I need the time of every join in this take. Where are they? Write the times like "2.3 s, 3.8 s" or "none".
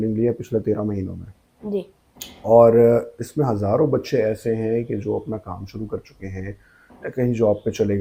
none